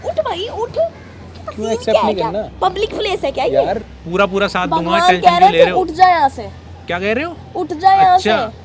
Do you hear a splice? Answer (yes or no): yes